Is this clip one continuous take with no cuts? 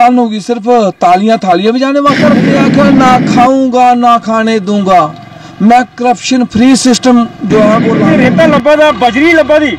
no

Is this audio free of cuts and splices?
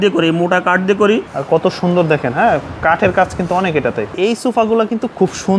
no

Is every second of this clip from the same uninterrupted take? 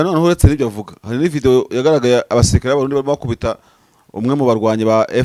yes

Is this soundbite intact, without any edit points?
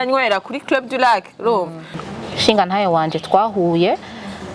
no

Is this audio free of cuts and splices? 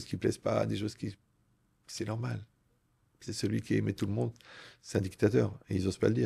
yes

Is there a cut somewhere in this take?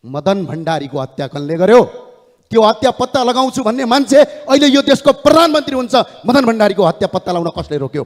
no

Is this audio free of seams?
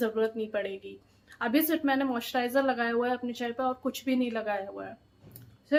yes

